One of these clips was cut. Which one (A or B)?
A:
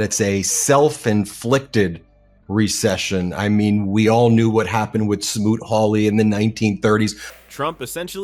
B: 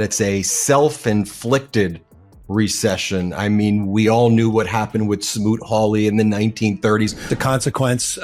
B